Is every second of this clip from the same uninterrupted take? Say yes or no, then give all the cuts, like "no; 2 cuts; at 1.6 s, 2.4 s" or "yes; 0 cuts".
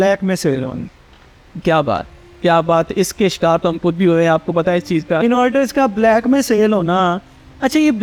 yes; 0 cuts